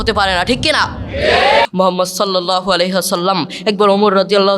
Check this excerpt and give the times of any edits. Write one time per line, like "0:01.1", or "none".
0:01.6